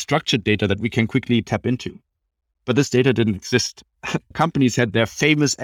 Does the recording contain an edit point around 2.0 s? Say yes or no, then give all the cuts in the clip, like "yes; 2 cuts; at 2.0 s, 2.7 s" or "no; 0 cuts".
no; 1 cut; at 4.3 s